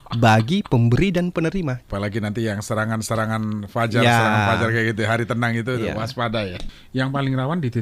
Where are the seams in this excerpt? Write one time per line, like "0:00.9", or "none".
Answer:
0:01.8
0:06.6